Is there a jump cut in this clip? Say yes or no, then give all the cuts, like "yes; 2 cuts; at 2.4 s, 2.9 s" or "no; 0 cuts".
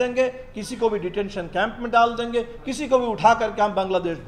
no; 0 cuts